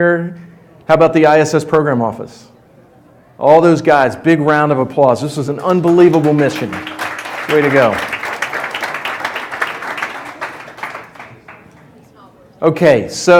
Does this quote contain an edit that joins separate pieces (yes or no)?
no